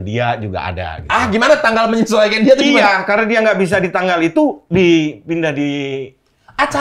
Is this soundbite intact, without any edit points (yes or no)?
yes